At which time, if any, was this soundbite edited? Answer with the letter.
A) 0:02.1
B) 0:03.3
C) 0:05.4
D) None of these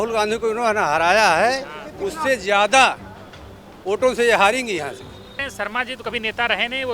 C